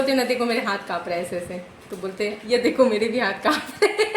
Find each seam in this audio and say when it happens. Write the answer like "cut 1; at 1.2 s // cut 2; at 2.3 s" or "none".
none